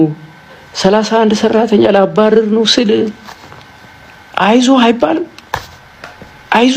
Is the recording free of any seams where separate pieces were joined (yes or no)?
yes